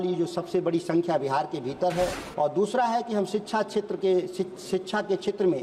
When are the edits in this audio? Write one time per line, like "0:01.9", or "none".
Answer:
0:02.2